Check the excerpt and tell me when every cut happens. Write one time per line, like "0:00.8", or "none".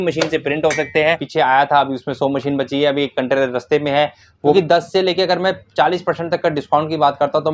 0:01.2
0:04.5